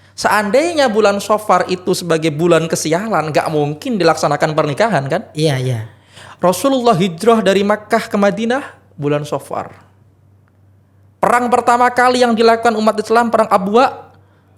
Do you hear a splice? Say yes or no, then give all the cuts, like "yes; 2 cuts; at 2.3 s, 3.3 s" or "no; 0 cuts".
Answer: no; 0 cuts